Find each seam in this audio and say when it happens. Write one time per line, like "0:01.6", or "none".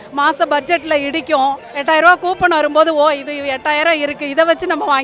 none